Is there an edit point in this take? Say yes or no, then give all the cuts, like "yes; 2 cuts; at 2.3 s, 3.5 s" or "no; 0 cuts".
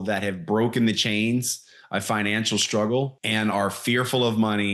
yes; 1 cut; at 3.2 s